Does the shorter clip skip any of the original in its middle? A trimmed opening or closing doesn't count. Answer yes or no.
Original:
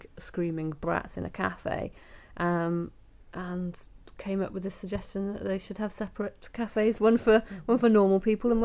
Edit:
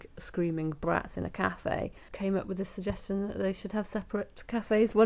yes